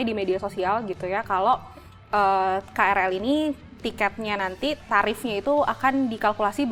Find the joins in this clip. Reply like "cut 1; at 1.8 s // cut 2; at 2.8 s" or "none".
none